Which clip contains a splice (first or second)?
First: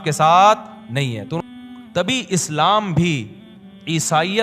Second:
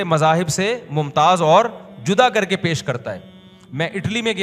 first